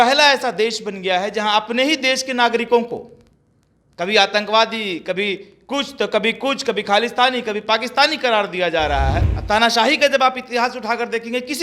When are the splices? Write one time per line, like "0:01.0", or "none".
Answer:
0:09.3